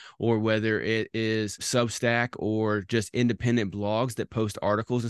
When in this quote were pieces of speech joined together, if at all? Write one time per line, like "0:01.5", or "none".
0:01.6